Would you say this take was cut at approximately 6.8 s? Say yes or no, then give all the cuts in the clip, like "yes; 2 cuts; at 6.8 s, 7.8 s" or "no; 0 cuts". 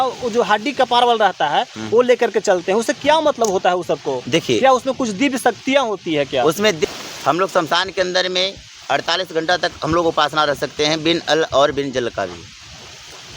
yes; 1 cut; at 6.8 s